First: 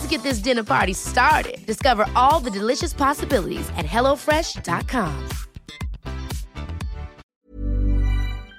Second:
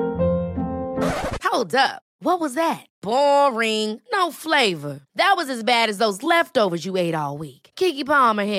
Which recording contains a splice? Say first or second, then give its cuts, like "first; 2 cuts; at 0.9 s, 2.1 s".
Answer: first; 1 cut; at 7.2 s